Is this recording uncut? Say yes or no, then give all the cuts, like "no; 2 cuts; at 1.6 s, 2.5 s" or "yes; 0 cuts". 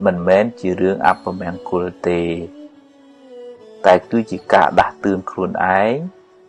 yes; 0 cuts